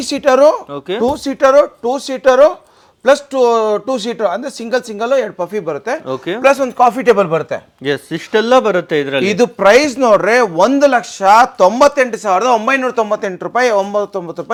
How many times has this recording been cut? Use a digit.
0